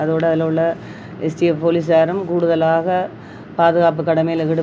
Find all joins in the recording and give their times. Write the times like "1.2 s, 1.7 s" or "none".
none